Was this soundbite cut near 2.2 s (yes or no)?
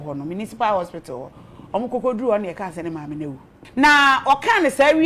no